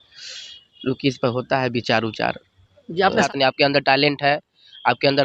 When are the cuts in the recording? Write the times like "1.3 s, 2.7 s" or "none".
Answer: 3.3 s